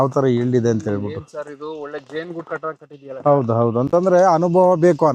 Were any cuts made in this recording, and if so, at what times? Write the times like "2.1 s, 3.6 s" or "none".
none